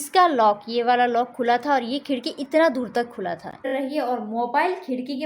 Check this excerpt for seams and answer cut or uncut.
cut